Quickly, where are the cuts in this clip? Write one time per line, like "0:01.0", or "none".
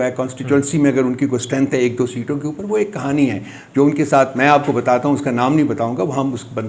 none